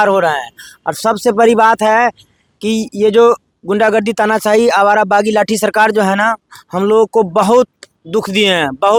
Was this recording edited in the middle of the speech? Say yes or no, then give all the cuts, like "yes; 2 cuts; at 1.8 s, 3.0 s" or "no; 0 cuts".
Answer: no; 0 cuts